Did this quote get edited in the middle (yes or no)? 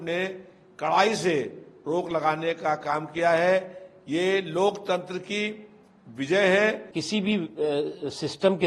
yes